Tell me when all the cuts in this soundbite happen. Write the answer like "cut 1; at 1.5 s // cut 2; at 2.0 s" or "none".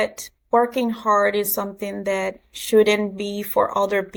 none